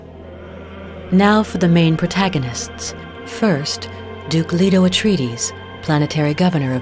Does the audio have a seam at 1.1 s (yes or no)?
yes